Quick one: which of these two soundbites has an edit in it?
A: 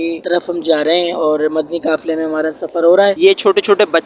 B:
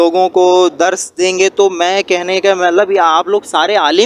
A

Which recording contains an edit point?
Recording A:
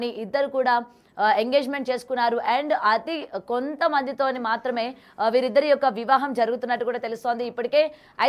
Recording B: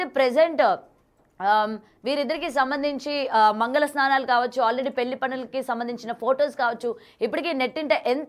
B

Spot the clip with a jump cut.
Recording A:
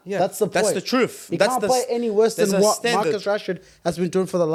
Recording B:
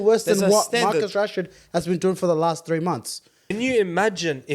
B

